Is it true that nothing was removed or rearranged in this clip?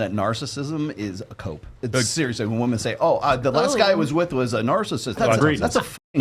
no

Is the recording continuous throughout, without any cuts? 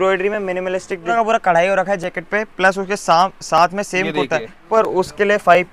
no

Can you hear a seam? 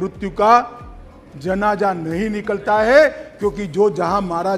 no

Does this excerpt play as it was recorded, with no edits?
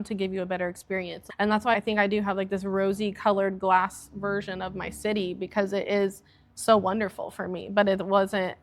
no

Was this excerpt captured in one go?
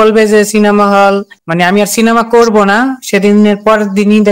yes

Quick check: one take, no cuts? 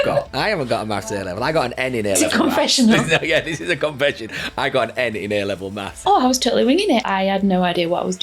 no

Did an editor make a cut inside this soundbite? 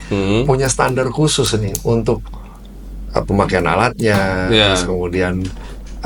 no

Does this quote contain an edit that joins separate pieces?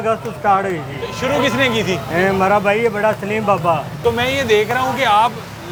no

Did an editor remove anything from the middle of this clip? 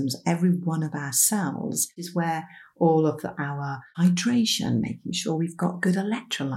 yes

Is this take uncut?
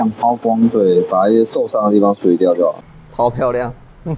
no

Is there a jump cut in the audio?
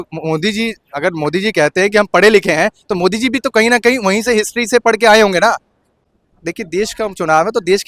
no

